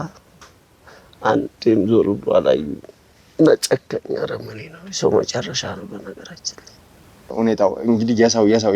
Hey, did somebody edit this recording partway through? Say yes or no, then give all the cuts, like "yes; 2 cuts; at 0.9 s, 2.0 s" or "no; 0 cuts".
yes; 1 cut; at 7.3 s